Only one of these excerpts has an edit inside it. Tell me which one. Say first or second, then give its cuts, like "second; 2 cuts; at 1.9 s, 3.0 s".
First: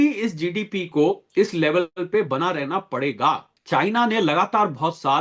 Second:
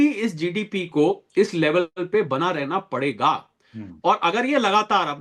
first; 1 cut; at 3.5 s